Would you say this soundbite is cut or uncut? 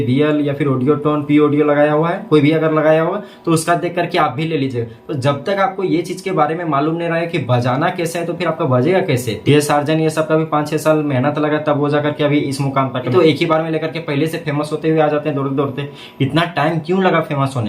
cut